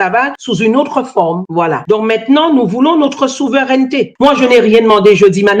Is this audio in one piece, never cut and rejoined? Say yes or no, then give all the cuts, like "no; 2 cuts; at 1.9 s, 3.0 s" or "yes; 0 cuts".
no; 1 cut; at 4.1 s